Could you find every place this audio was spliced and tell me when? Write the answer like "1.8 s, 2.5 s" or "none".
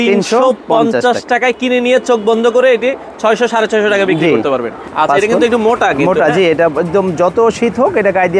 4.8 s